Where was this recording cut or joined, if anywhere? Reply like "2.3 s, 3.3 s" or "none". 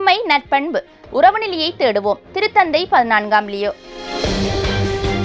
4.0 s